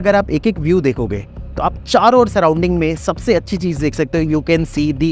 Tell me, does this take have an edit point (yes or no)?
no